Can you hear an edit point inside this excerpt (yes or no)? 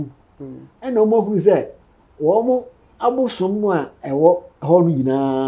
no